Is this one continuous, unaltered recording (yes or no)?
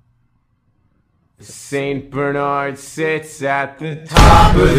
yes